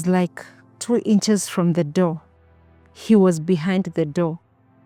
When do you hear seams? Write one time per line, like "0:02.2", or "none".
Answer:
none